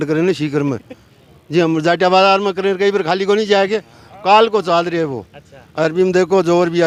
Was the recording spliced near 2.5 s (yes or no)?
no